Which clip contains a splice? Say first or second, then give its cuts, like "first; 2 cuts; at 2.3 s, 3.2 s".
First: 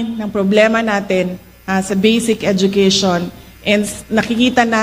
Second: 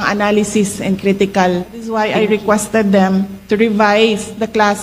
second; 1 cut; at 1.9 s